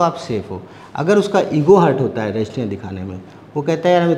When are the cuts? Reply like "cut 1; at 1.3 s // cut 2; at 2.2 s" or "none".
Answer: none